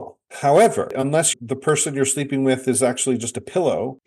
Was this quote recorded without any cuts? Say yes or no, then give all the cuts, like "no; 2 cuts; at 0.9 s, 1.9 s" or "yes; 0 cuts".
no; 1 cut; at 1.0 s